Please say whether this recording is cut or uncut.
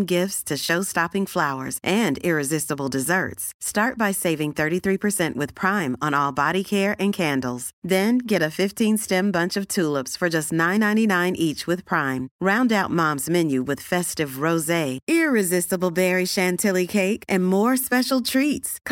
uncut